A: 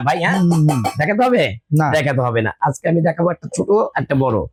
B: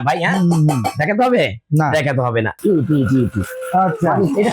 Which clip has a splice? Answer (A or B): B